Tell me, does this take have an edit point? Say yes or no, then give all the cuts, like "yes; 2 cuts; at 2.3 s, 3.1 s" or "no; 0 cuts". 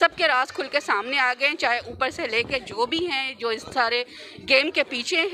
no; 0 cuts